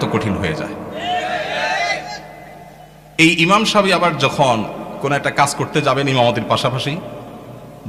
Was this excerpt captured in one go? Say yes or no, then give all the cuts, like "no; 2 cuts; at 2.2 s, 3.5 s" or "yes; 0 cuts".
yes; 0 cuts